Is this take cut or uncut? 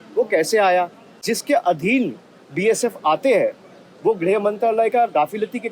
cut